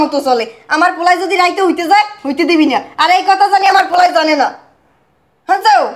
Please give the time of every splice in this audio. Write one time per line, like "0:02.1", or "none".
none